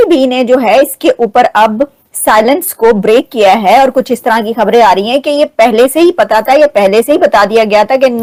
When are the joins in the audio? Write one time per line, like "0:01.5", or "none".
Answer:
none